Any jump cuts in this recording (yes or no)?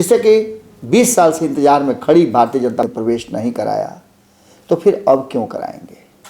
yes